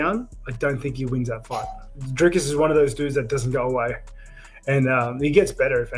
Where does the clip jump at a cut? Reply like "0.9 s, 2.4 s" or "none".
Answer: 1.9 s